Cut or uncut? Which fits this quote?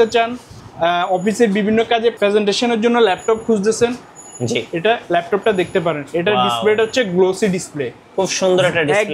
cut